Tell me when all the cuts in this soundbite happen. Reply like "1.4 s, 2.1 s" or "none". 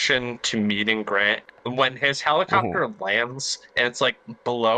1.5 s